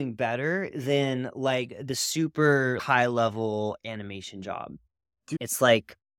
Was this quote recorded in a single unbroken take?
no; 2 cuts; at 2.8 s, 5.2 s

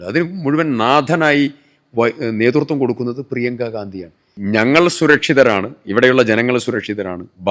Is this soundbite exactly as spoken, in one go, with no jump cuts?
no; 1 cut; at 4.3 s

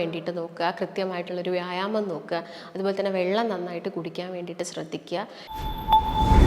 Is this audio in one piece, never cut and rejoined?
no; 1 cut; at 5.5 s

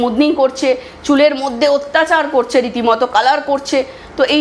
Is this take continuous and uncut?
yes; 0 cuts

